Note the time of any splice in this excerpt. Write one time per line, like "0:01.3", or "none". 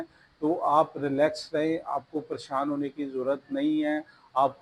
none